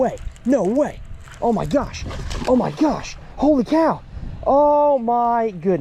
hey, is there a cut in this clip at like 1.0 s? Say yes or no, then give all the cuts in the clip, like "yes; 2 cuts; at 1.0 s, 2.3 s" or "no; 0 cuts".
no; 0 cuts